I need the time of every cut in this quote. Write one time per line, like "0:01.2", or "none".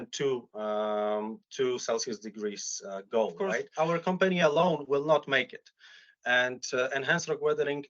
0:03.7